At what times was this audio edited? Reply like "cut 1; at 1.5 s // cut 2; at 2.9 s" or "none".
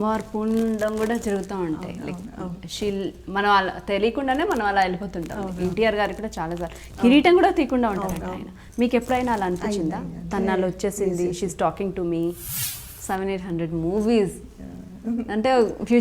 cut 1; at 12.6 s

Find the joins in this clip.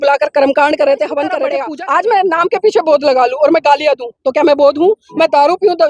cut 1; at 1.6 s

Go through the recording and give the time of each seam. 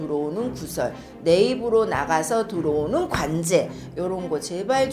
none

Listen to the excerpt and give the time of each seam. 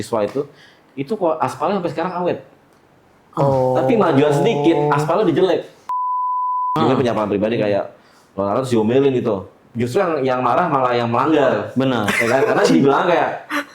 cut 1; at 6.1 s

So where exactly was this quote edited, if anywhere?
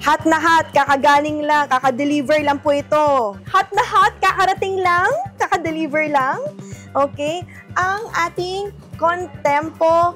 cut 1; at 3.4 s

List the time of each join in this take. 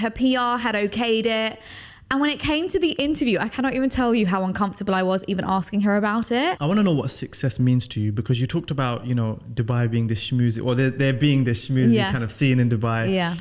cut 1; at 6.6 s

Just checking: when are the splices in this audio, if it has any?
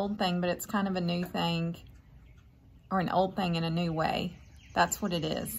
none

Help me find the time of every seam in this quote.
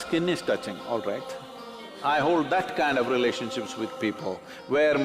cut 1; at 1.9 s

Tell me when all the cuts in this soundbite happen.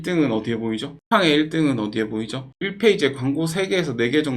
cut 1; at 0.9 s // cut 2; at 2.5 s

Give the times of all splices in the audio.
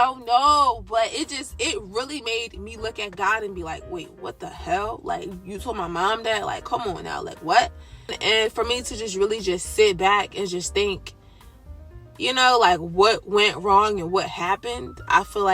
cut 1; at 8.2 s

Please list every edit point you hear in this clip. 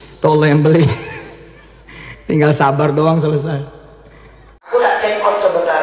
cut 1; at 4.6 s

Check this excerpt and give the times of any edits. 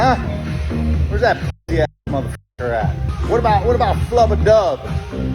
cut 1; at 3.1 s

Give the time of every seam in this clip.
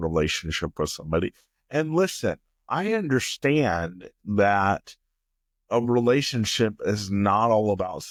none

